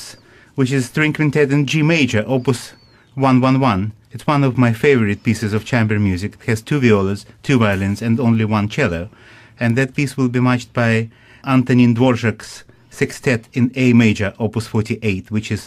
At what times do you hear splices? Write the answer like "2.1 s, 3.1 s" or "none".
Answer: none